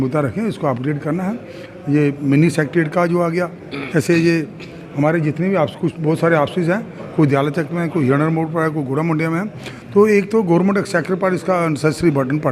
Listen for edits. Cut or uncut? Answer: uncut